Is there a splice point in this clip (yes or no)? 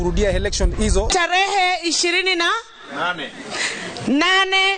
yes